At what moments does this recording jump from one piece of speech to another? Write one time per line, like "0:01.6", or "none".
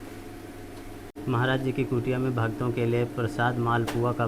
0:01.1